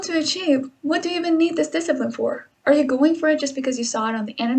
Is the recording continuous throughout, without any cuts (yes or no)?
yes